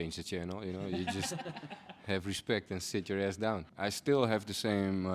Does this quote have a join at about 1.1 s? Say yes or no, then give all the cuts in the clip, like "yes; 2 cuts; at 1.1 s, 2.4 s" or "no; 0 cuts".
no; 1 cut; at 3.7 s